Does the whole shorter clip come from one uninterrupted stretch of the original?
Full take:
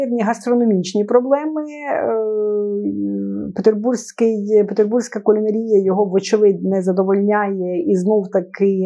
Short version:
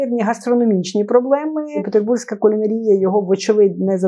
no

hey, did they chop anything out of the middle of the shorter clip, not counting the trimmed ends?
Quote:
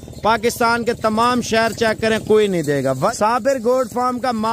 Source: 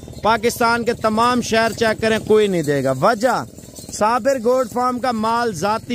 yes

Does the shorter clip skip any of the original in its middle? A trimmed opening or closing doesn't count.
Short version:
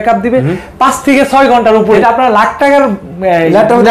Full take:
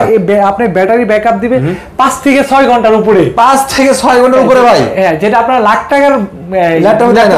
yes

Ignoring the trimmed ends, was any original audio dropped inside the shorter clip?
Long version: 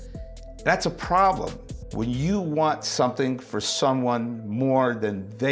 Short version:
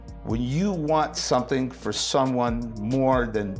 no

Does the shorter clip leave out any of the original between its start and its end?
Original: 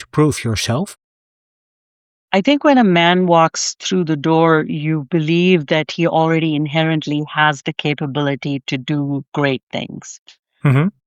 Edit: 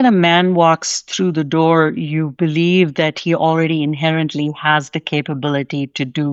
no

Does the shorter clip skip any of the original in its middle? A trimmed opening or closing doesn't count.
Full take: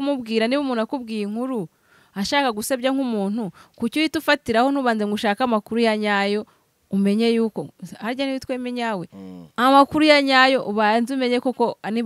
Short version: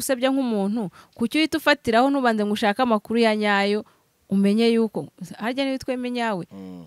no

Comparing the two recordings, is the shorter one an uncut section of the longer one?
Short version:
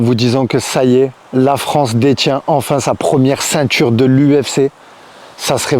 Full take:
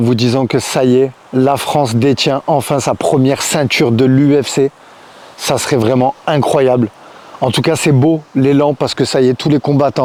yes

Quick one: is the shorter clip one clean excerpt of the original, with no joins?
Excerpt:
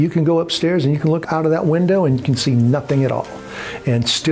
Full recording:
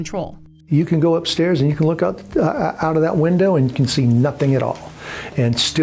no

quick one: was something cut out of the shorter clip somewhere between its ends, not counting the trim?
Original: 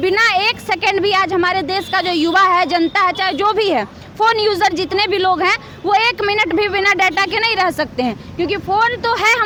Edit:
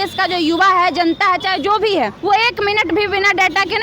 yes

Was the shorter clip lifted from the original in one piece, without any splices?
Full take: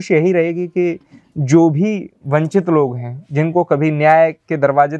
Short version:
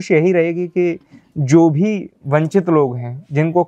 yes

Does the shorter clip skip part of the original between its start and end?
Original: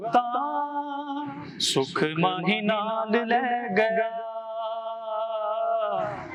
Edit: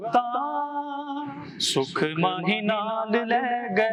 no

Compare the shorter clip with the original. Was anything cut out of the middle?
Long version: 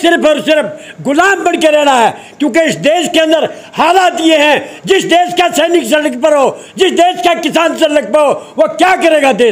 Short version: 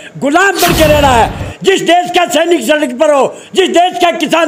yes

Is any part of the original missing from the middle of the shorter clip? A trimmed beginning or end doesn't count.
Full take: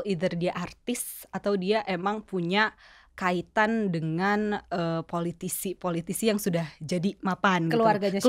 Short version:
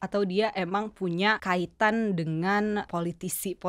yes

